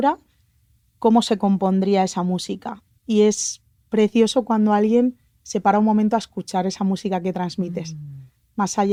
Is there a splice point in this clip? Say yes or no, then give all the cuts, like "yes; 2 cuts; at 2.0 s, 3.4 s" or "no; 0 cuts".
no; 0 cuts